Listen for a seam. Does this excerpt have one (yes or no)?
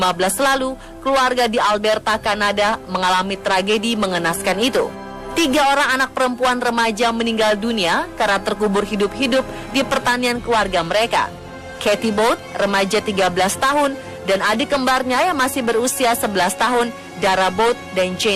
yes